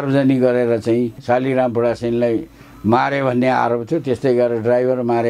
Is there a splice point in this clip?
yes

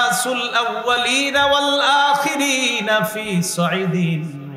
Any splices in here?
no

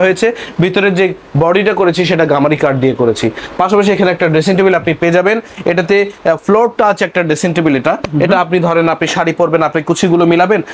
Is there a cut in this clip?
no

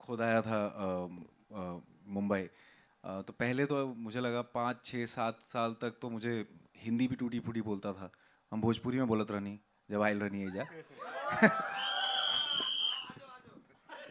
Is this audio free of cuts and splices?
yes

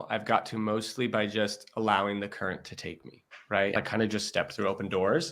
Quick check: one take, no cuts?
no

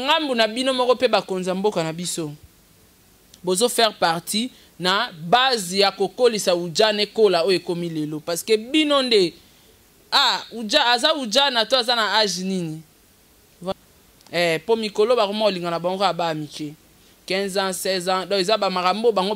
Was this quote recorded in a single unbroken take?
no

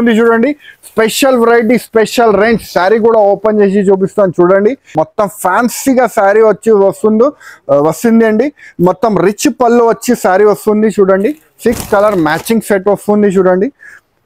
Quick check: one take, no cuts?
no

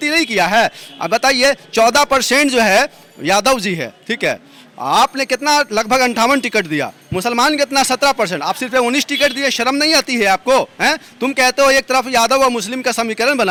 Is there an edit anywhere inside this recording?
no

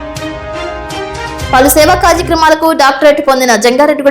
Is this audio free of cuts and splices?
no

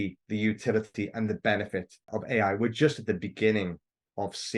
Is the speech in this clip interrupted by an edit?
no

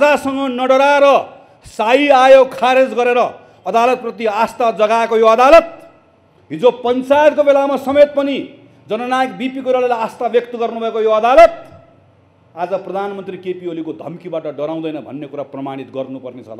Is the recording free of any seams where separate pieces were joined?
yes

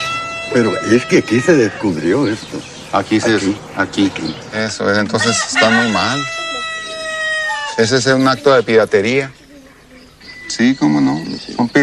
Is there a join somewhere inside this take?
yes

